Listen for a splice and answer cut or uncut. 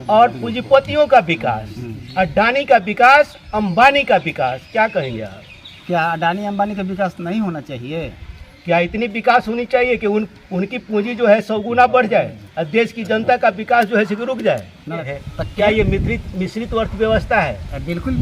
cut